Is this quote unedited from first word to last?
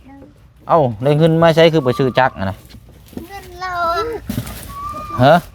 yes; 0 cuts

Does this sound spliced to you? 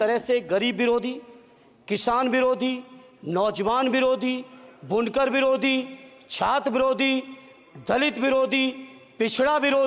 no; 0 cuts

